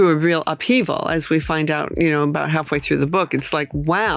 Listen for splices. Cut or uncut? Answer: uncut